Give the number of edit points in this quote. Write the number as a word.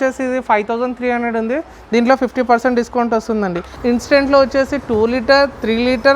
one